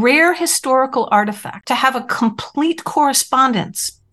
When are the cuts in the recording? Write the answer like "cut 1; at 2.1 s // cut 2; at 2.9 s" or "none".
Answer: cut 1; at 1.5 s